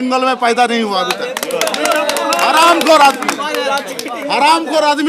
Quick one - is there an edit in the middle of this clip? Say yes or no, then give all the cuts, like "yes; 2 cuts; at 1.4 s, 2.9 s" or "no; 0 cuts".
no; 0 cuts